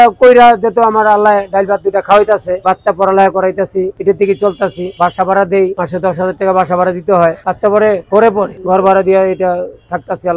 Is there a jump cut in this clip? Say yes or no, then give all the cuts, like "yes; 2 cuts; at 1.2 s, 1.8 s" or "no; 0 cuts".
no; 0 cuts